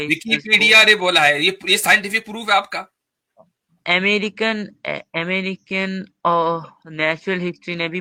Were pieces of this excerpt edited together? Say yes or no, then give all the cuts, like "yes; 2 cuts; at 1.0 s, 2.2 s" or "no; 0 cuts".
no; 0 cuts